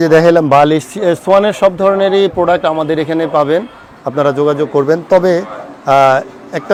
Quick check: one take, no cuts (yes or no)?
yes